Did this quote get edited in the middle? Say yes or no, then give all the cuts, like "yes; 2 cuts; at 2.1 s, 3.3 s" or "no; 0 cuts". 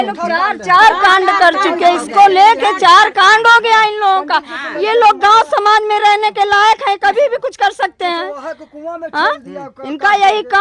no; 0 cuts